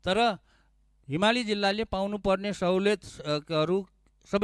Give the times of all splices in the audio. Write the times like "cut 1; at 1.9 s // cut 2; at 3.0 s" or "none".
none